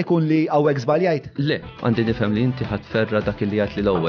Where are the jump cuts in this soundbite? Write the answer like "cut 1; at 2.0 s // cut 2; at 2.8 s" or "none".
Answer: cut 1; at 1.8 s